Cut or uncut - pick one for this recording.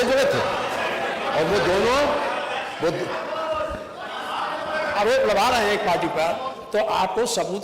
uncut